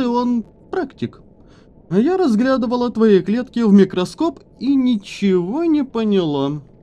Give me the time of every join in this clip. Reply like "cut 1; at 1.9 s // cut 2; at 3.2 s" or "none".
none